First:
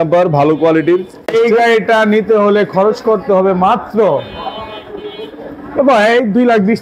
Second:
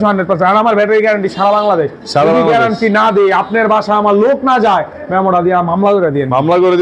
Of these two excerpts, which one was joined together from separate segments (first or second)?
first